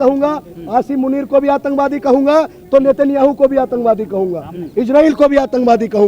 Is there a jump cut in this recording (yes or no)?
no